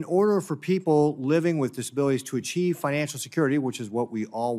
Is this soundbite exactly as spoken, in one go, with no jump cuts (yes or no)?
no